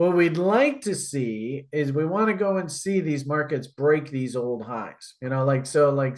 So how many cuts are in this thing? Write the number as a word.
zero